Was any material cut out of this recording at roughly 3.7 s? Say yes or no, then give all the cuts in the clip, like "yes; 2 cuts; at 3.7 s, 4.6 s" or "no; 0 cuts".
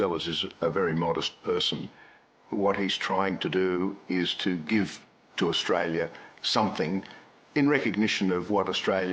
no; 1 cut; at 2.2 s